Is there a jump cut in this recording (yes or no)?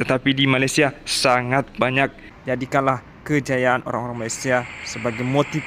yes